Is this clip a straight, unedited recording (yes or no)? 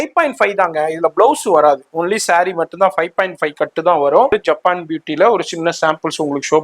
no